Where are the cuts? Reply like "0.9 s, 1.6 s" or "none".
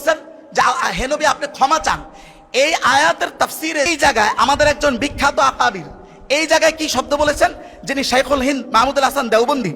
3.9 s